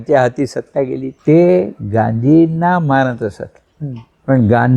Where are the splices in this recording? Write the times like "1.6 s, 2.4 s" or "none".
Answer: 1.1 s

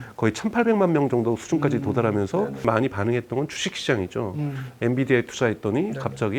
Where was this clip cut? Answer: 2.6 s

